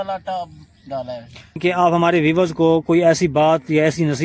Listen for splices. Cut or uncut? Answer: cut